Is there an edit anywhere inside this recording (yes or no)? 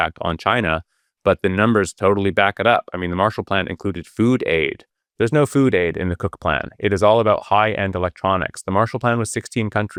no